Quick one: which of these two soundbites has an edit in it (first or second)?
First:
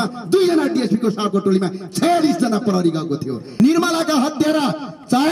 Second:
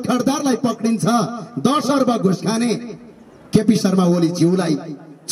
first